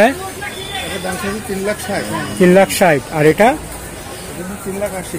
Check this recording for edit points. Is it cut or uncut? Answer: uncut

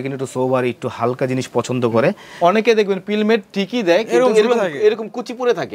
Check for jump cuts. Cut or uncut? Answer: cut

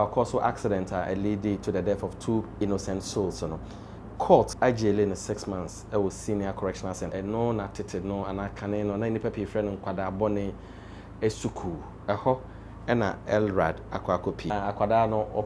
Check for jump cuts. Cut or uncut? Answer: cut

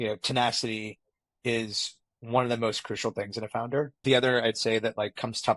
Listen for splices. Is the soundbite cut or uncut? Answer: cut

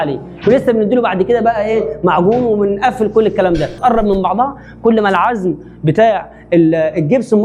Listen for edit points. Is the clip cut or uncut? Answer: cut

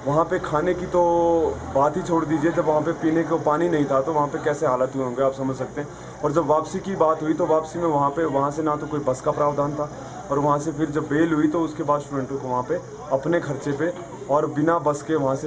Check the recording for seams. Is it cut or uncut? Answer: uncut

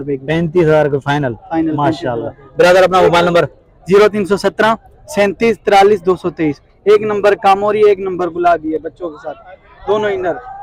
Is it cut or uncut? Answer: uncut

